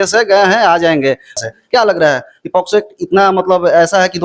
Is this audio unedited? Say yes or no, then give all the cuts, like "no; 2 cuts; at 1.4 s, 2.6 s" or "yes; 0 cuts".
no; 1 cut; at 1.4 s